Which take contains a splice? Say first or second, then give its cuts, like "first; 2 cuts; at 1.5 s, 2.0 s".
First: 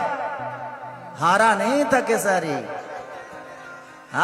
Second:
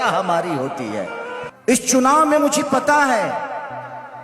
second; 1 cut; at 1.4 s